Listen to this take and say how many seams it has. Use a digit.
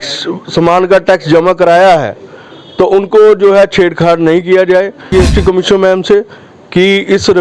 1